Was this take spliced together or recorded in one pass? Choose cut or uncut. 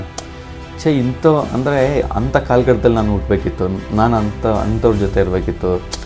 uncut